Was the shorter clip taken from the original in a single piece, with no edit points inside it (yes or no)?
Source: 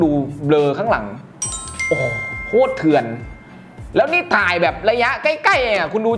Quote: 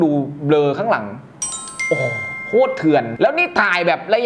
no